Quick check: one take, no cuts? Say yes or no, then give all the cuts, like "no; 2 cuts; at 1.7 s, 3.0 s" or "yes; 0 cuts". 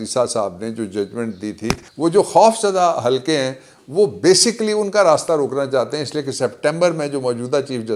no; 1 cut; at 1.9 s